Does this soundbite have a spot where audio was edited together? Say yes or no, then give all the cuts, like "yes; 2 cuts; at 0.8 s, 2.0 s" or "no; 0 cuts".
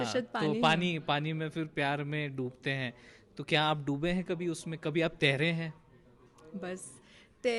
no; 0 cuts